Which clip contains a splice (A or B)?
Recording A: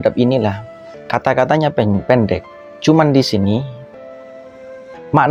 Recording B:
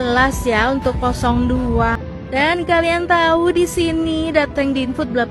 B